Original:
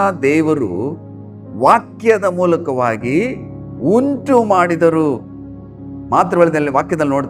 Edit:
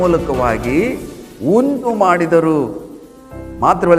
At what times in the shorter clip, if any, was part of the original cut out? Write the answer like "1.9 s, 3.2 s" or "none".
1.9 s

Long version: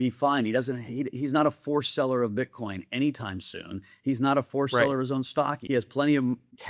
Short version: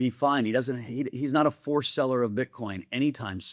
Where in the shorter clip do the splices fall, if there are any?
none

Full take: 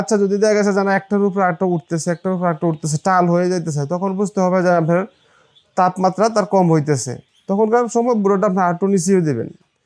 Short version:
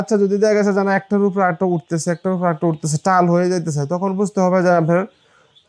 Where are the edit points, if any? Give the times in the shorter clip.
none

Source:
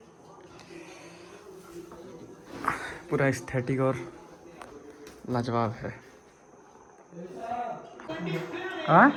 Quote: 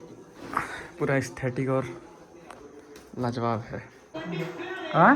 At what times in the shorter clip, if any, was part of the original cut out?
4.0 s

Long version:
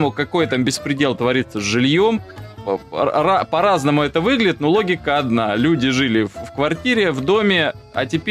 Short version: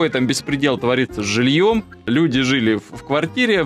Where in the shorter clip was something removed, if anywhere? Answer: 2.0 s

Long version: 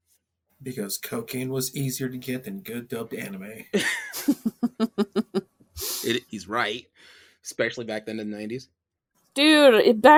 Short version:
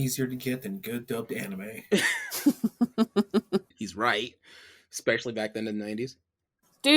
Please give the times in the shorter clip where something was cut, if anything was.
3.8 s

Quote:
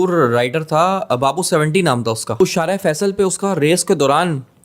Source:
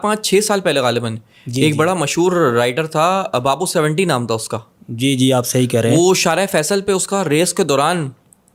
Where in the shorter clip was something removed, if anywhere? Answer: 2.4 s

